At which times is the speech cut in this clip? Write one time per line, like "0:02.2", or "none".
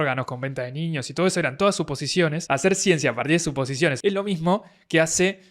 0:02.4
0:04.0

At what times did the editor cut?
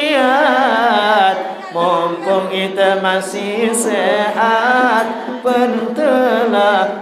none

